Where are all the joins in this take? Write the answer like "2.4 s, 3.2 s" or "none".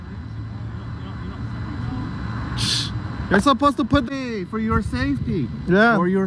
4.0 s